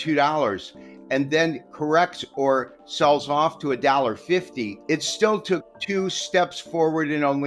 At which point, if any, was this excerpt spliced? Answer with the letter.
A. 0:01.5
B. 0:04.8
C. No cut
B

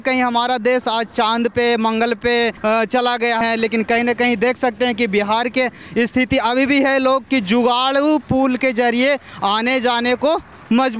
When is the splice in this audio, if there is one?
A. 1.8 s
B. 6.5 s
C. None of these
C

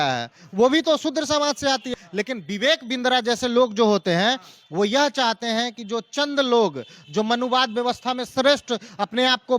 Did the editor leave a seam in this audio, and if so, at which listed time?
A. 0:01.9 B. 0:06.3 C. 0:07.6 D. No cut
A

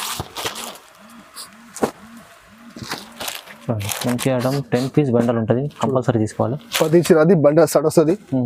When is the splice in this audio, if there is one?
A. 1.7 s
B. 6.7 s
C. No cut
C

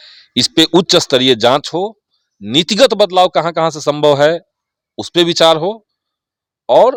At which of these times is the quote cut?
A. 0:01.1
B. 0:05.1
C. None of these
C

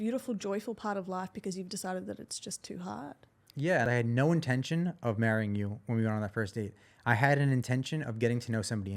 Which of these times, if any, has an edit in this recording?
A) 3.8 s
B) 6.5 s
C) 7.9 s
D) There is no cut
A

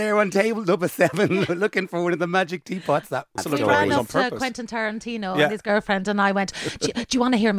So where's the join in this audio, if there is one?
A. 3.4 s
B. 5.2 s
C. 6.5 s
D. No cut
A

